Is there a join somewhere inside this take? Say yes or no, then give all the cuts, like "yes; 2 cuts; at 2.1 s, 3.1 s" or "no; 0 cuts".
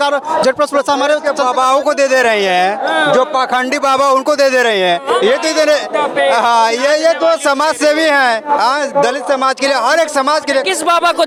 no; 0 cuts